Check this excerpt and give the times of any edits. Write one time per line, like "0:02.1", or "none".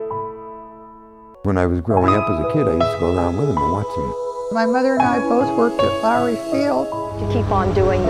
none